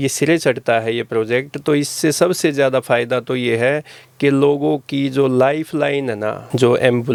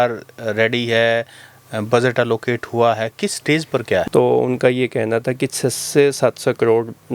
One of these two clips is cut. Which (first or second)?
second